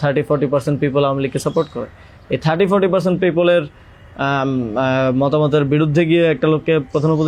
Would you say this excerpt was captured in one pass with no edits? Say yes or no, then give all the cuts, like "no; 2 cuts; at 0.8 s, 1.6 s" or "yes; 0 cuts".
yes; 0 cuts